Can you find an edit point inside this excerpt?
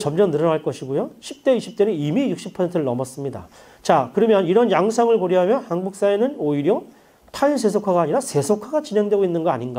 yes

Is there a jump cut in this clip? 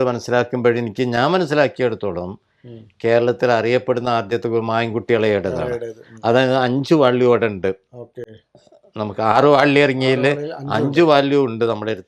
no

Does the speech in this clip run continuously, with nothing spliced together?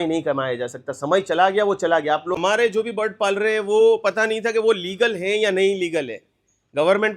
no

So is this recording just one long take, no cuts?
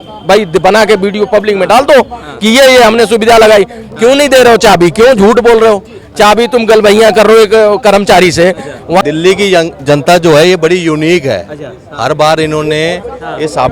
no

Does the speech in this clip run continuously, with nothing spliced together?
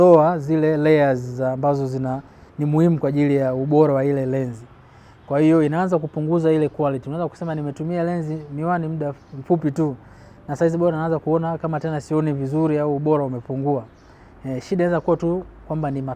yes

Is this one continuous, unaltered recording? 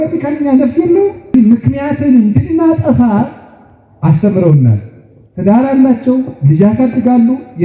no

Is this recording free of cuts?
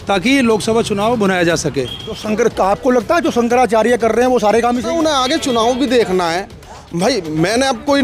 no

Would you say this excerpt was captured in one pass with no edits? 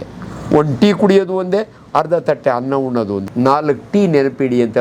no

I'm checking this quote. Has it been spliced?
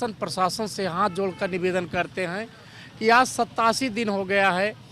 no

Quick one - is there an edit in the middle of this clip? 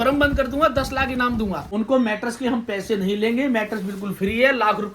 yes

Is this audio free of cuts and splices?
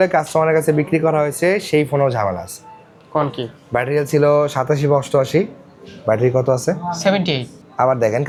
yes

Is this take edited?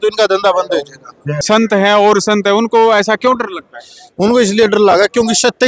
yes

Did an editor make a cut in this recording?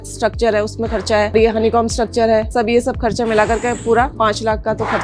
yes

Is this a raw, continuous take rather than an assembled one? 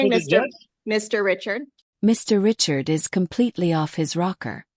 yes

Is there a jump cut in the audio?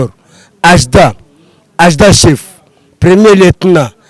no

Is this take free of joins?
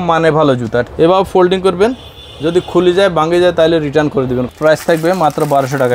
no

